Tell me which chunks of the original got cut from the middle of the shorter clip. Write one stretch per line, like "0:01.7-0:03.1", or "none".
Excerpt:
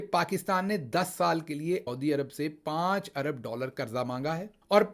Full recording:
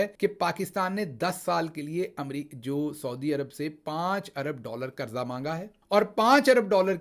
0:02.1-0:03.1